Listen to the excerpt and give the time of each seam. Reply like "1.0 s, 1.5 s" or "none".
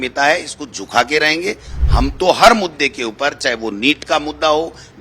1.8 s